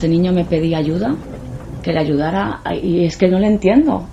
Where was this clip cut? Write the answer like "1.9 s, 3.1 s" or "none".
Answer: none